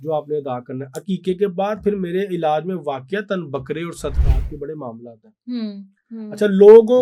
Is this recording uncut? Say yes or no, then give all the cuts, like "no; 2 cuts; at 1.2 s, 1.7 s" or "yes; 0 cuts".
yes; 0 cuts